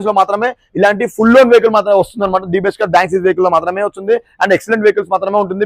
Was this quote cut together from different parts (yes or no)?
no